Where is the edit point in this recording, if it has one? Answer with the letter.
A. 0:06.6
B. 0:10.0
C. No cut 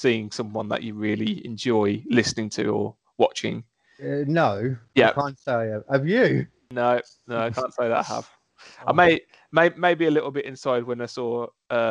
A